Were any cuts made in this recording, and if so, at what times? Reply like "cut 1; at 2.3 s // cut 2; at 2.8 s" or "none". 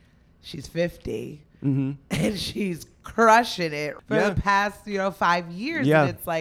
cut 1; at 3.9 s